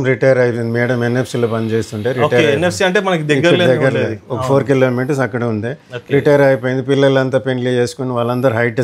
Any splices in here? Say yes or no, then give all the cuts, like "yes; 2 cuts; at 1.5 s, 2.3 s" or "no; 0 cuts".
no; 0 cuts